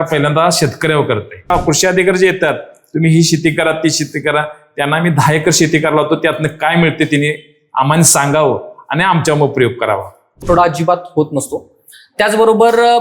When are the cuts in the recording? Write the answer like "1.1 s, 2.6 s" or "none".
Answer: 1.6 s, 10.4 s